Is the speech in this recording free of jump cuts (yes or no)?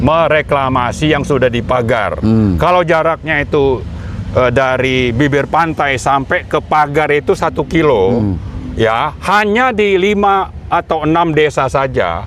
yes